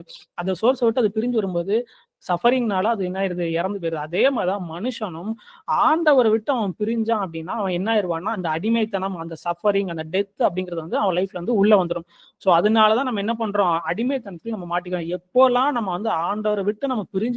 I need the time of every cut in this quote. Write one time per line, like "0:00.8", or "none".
none